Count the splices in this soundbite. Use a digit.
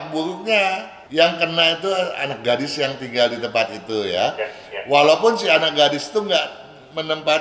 1